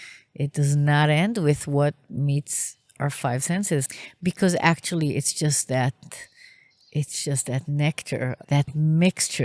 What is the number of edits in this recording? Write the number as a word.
two